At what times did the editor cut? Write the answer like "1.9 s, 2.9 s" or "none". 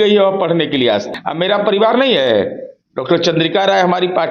1.1 s